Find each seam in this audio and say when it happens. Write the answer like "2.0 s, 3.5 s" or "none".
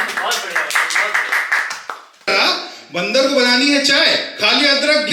2.3 s